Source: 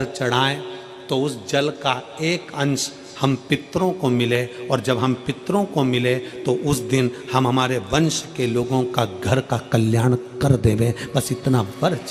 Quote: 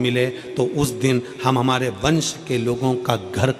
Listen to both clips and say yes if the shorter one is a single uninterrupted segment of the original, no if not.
yes